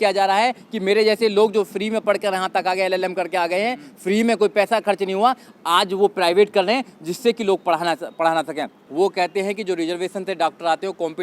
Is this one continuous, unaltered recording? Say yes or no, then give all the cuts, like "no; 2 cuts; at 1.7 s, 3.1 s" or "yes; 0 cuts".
no; 1 cut; at 8.8 s